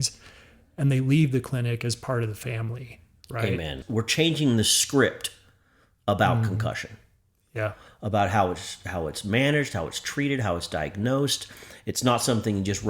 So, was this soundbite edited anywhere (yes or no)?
yes